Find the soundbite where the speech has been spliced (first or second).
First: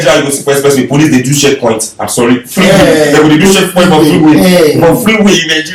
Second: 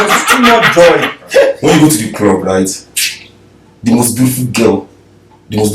second